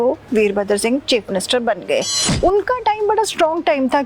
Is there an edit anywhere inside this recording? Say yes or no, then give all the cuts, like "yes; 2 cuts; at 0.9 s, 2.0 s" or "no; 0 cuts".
yes; 1 cut; at 2.2 s